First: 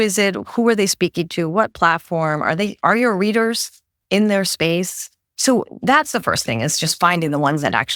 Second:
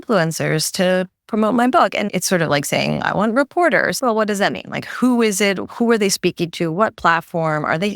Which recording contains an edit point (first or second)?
second